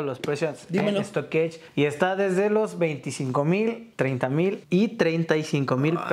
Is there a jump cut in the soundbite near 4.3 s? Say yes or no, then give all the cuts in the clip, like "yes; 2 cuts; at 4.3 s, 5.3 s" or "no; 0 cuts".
yes; 2 cuts; at 1.6 s, 4.3 s